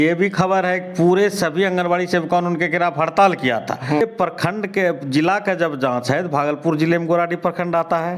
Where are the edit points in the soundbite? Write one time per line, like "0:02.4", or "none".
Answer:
0:04.0